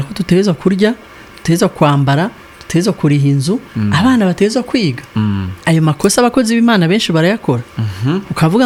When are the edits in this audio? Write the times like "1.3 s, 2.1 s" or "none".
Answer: none